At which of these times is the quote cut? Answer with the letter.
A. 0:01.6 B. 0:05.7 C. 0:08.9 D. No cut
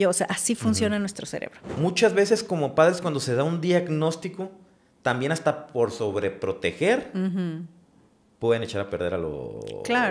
A